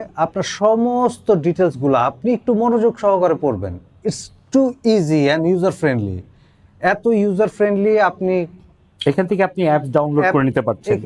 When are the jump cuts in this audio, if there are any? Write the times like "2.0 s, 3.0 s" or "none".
none